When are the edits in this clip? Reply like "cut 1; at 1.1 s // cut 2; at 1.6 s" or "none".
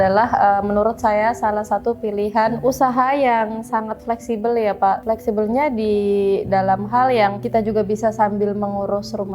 cut 1; at 2.6 s // cut 2; at 5.0 s // cut 3; at 7.4 s